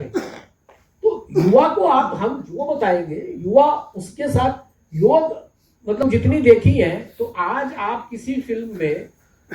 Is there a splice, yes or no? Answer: yes